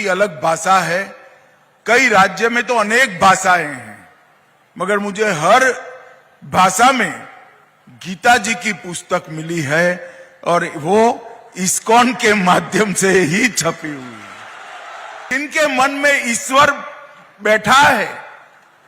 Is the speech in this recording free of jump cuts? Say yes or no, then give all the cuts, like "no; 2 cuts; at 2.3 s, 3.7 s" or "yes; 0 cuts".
no; 1 cut; at 15.3 s